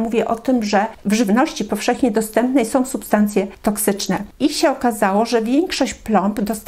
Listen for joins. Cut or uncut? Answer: cut